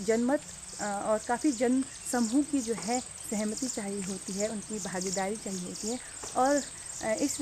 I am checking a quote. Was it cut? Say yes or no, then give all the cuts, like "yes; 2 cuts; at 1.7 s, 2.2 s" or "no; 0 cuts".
no; 0 cuts